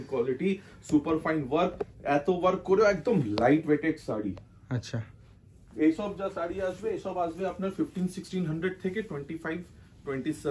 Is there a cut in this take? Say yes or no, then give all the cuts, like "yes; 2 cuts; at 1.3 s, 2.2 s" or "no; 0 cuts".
no; 0 cuts